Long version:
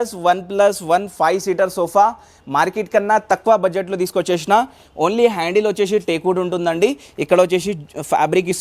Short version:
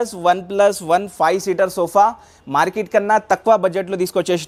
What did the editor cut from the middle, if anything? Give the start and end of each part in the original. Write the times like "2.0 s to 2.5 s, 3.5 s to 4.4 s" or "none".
none